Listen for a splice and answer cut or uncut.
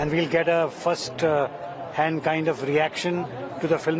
uncut